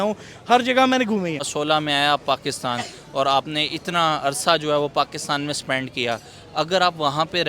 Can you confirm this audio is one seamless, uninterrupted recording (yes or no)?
no